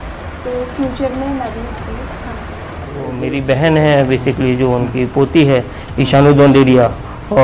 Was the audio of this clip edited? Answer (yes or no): yes